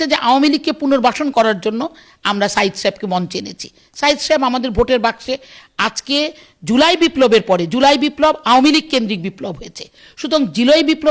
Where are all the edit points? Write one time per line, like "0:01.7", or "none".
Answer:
none